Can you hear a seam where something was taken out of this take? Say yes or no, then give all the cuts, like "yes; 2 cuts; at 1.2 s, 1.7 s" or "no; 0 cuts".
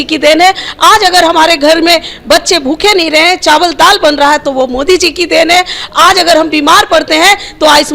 no; 0 cuts